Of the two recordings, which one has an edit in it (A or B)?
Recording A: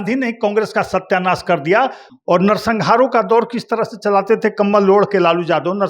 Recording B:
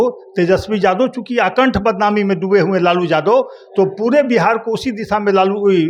A